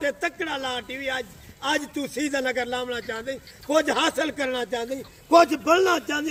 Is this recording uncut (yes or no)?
yes